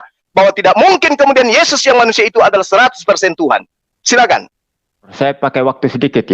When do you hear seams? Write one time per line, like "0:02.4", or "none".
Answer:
0:05.1